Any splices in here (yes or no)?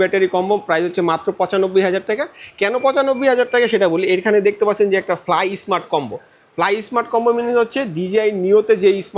no